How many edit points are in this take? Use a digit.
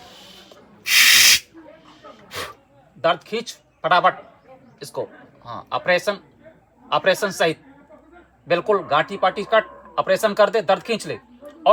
0